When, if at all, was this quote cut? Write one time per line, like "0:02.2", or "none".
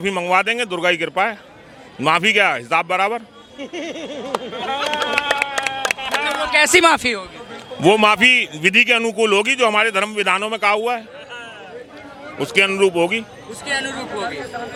none